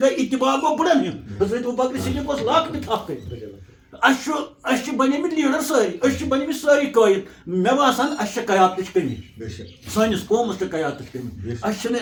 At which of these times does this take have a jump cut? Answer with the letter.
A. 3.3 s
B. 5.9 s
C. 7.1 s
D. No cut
D